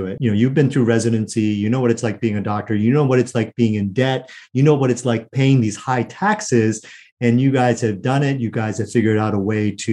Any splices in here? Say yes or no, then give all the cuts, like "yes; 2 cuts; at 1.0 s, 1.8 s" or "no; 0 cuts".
no; 0 cuts